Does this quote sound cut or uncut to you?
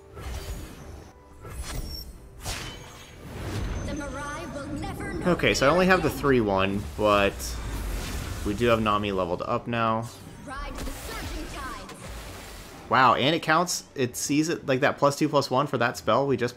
cut